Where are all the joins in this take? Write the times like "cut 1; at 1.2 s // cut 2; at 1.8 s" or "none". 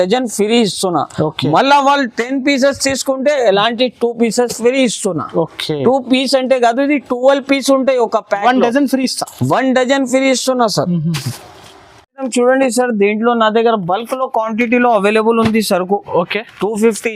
none